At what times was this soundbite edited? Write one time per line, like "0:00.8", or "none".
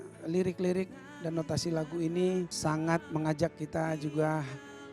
0:02.5